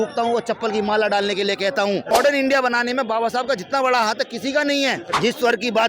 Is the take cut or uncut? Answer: cut